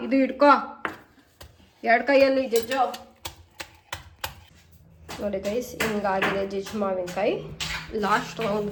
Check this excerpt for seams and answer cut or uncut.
uncut